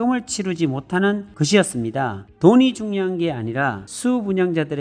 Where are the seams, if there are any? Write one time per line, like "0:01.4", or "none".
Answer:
0:02.3